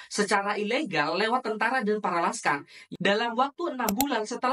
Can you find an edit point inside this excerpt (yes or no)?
yes